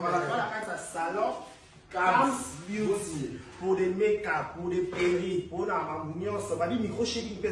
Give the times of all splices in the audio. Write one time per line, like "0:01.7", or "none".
none